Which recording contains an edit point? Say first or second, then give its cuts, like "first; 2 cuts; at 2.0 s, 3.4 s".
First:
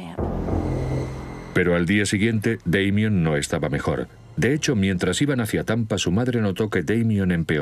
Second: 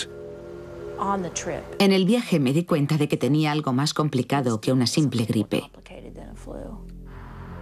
first; 1 cut; at 4.6 s